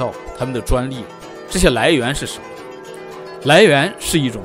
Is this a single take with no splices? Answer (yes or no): yes